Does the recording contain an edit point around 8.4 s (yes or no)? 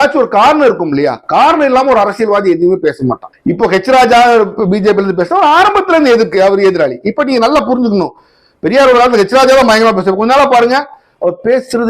no